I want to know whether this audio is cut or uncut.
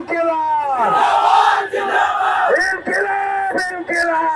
uncut